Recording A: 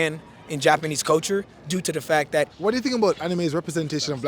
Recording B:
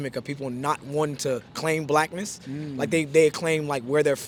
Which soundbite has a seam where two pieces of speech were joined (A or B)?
A